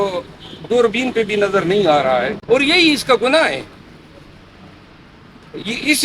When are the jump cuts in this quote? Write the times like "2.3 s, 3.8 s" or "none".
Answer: 2.4 s